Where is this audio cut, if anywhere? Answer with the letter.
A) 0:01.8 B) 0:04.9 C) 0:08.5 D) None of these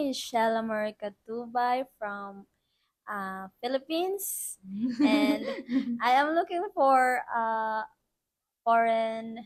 D